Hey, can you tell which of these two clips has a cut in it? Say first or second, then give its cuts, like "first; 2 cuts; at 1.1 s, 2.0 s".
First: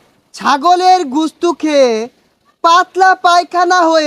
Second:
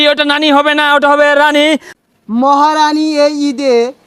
second; 1 cut; at 1.9 s